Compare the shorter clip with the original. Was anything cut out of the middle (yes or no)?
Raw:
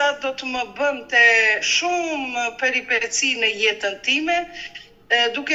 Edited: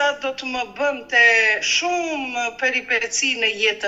no